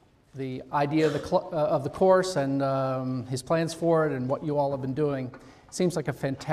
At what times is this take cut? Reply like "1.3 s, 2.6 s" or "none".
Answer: 1.7 s